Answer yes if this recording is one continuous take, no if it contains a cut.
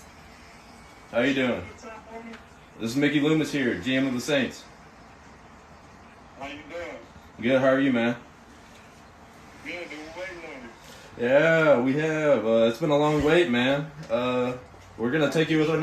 yes